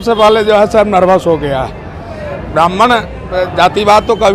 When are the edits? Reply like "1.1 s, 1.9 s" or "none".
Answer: none